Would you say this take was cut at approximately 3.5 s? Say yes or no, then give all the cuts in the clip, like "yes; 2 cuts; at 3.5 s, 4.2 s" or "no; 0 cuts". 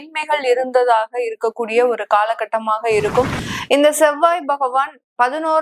yes; 1 cut; at 3.5 s